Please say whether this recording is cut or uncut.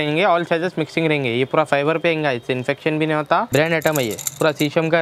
cut